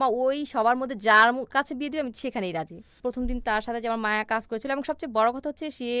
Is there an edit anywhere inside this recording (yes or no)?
yes